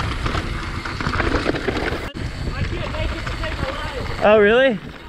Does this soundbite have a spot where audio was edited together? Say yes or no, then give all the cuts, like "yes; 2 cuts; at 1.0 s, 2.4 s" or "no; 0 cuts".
yes; 1 cut; at 2.2 s